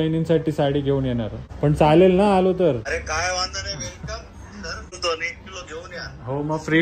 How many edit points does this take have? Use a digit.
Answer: 3